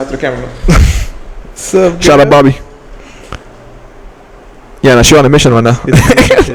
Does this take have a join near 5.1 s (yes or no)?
no